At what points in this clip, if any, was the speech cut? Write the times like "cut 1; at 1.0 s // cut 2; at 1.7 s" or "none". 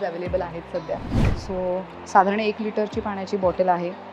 cut 1; at 1.4 s